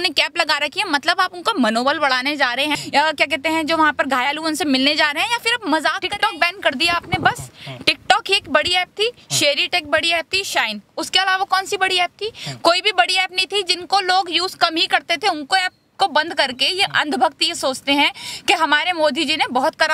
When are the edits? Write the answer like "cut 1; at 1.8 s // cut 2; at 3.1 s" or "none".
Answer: cut 1; at 2.8 s // cut 2; at 6.0 s